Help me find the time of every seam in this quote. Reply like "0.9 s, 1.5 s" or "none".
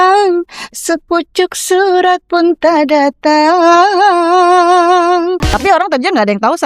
5.5 s

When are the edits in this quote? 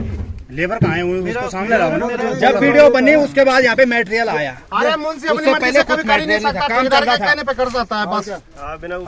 none

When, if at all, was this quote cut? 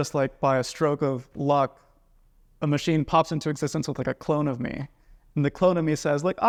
none

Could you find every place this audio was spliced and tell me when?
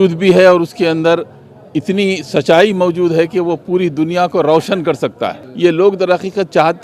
5.4 s

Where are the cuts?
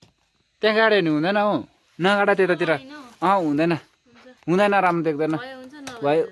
none

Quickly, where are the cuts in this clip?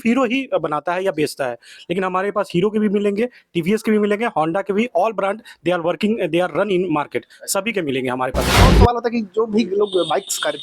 8.6 s

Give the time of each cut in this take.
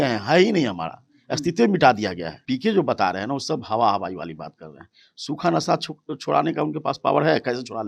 2.3 s

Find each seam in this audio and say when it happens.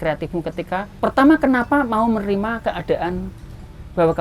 0.9 s

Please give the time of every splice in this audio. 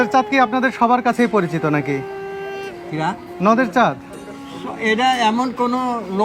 none

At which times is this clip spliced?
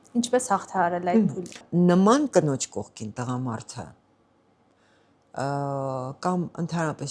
1.6 s

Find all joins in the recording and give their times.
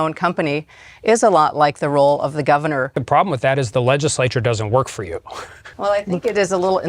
2.9 s, 5.6 s

